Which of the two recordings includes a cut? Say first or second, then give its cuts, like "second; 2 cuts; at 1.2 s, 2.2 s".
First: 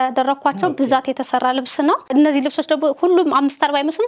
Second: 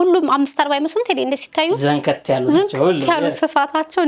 first; 1 cut; at 2.0 s